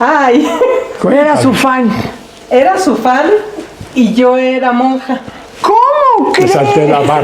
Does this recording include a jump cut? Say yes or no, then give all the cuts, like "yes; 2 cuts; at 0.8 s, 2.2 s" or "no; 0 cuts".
no; 0 cuts